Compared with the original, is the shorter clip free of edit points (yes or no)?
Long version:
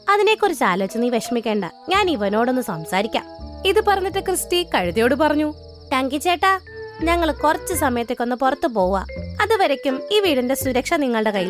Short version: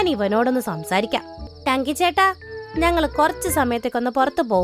no